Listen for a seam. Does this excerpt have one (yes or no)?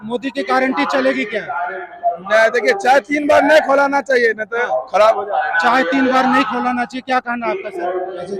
no